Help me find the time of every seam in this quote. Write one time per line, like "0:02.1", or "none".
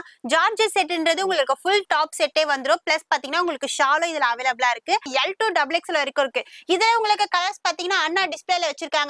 0:05.1